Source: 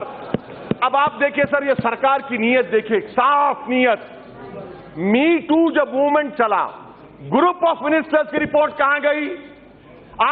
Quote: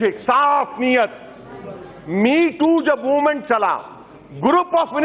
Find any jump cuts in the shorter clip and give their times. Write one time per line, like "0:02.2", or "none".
none